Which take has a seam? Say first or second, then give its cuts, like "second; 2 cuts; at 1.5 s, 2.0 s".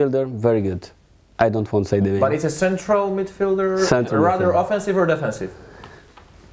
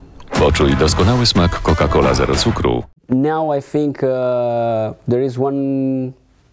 second; 1 cut; at 3.0 s